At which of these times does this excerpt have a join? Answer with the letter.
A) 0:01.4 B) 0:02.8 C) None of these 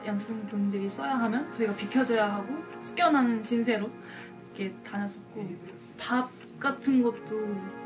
B